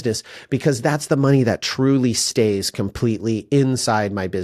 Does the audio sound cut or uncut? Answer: uncut